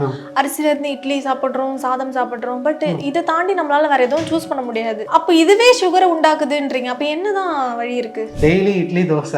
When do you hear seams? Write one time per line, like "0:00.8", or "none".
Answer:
0:08.2